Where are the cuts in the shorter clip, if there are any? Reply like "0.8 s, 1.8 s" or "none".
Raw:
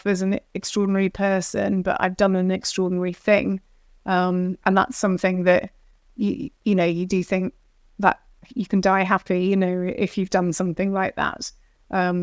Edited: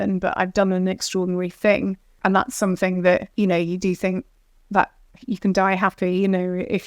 2.1 s, 3.3 s